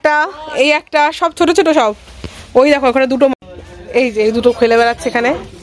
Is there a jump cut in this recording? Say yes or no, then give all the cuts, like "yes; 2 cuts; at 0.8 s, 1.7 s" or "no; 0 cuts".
yes; 1 cut; at 3.3 s